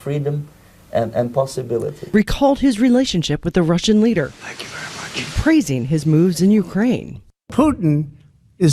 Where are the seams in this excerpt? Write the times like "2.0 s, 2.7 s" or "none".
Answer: 2.0 s